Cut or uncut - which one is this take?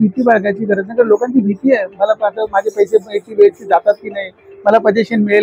uncut